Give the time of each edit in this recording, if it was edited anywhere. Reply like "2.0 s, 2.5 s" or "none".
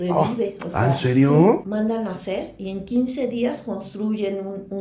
1.6 s